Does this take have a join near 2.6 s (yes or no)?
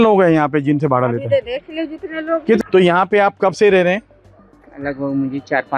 yes